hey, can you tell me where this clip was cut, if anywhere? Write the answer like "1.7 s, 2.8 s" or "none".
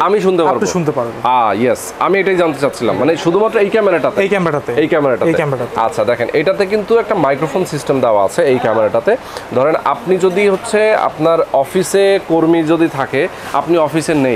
none

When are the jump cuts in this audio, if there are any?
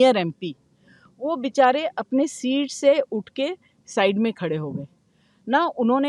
none

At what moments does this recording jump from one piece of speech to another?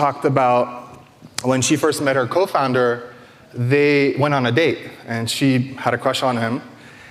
none

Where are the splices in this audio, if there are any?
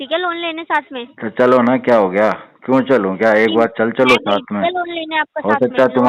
none

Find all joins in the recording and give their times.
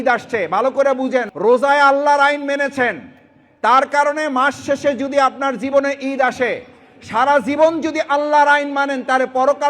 1.3 s

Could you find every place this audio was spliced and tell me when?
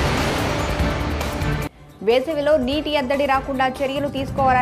1.4 s

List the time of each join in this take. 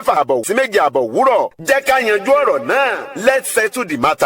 1.5 s

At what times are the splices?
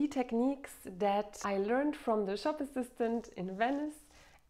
1.4 s

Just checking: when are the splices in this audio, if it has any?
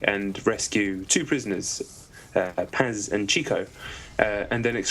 2.7 s

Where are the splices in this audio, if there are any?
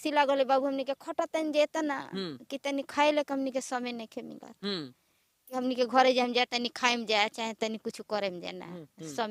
none

